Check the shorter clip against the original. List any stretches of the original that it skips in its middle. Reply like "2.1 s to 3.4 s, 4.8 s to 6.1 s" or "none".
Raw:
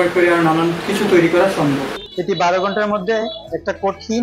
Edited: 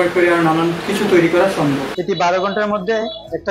1.9 s to 2.1 s

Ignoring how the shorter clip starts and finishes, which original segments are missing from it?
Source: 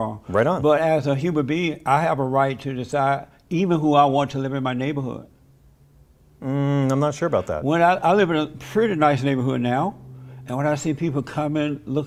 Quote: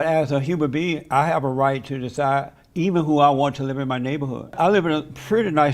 5.3 s to 8.0 s

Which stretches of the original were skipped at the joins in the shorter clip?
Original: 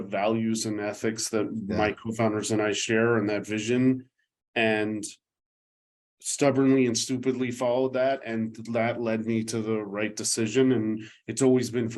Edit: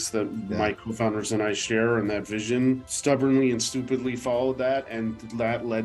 4.1 s to 6.2 s

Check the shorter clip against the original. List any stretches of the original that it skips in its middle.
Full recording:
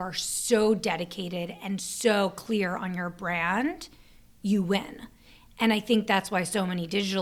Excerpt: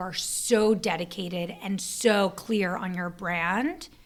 none

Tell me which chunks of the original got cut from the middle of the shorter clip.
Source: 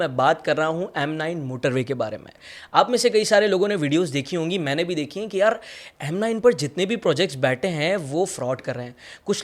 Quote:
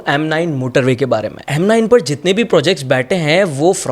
2.3 s to 5.9 s

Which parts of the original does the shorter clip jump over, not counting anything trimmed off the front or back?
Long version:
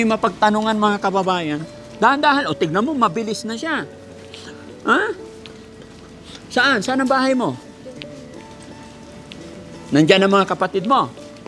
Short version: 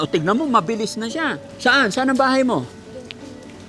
3.9 s to 6.4 s

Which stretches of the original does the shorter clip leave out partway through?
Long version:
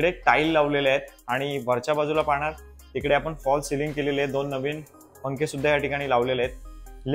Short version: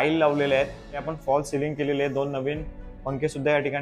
1.4 s to 3.2 s

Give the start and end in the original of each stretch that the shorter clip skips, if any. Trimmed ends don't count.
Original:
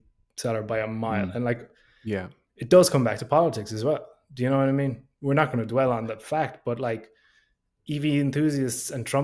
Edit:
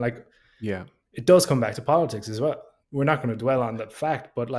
4.2 s to 5.1 s

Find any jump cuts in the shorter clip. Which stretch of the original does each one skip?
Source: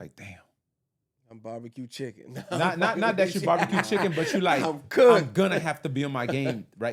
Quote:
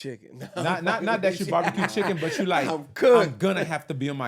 none

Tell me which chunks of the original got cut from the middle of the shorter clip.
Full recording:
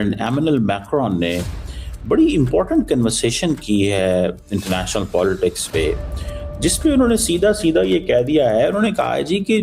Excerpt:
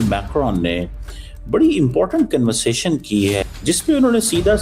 4.0 s to 6.4 s

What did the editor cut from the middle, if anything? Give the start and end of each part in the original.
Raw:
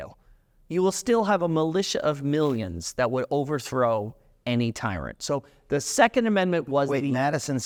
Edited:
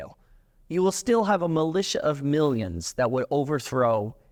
none

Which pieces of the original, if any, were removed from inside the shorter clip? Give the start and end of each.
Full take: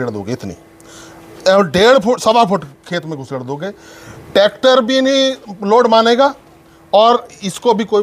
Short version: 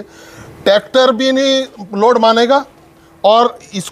none

